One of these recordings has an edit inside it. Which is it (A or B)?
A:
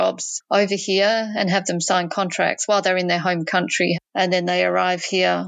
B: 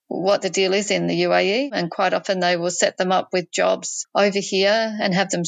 B